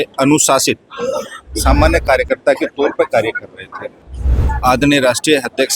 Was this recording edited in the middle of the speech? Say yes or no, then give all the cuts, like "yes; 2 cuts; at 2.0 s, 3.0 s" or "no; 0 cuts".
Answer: yes; 1 cut; at 4.0 s